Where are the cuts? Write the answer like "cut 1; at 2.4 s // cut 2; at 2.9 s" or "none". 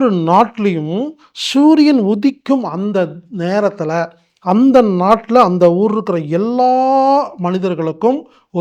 none